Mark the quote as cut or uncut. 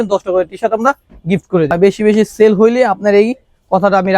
cut